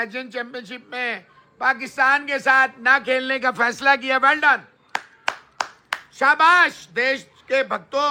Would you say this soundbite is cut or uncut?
uncut